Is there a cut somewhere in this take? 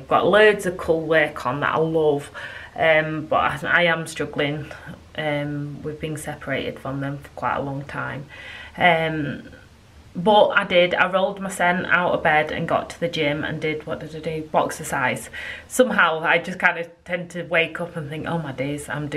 no; 0 cuts

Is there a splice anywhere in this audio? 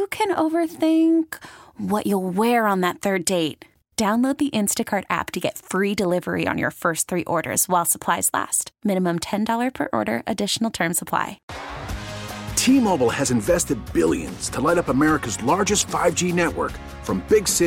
yes; 1 cut; at 11.3 s

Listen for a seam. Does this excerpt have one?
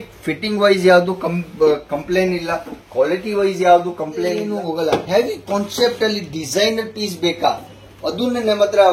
yes; 1 cut; at 4.5 s

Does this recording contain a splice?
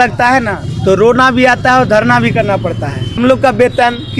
yes; 1 cut; at 3.2 s

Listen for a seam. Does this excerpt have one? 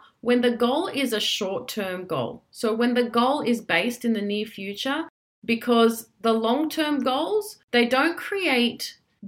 yes; 1 cut; at 7.6 s

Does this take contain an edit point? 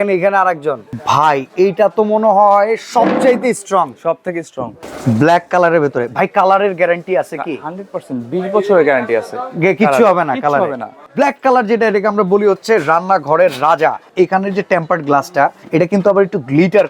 yes; 5 cuts; at 0.9 s, 4.8 s, 11.1 s, 14.1 s, 15.6 s

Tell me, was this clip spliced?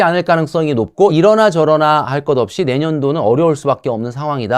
yes; 1 cut; at 1.1 s

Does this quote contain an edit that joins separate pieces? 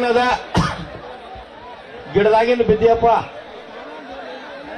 no; 0 cuts

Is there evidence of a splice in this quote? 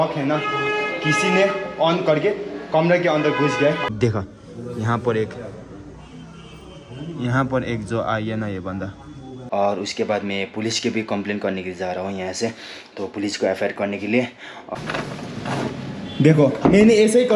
yes; 3 cuts; at 3.9 s, 9.3 s, 14.7 s

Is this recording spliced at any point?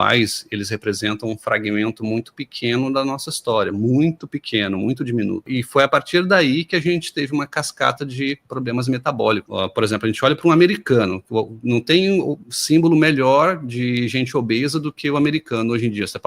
yes; 2 cuts; at 5.5 s, 9.5 s

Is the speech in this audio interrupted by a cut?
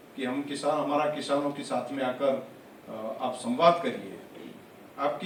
no; 0 cuts

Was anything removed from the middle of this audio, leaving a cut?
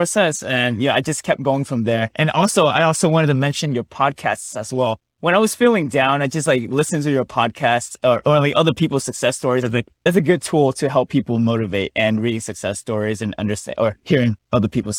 yes; 1 cut; at 10.0 s

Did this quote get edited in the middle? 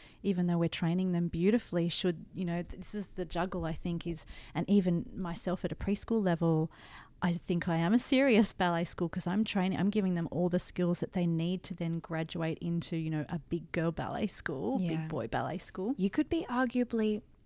no; 0 cuts

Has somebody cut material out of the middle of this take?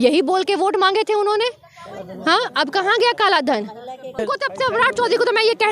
yes; 1 cut; at 4.2 s

